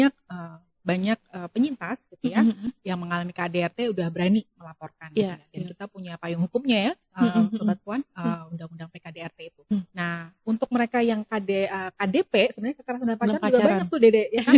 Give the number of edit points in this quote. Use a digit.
1